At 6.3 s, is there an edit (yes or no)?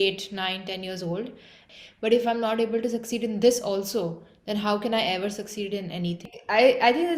yes